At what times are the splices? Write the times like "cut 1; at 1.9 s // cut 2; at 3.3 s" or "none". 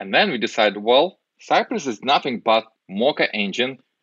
cut 1; at 1.3 s // cut 2; at 2.8 s

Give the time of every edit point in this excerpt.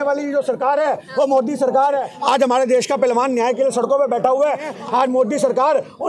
cut 1; at 2.1 s // cut 2; at 4.7 s

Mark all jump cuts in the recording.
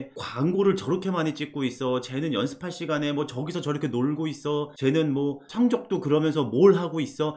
none

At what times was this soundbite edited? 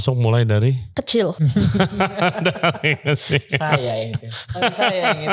cut 1; at 1.3 s

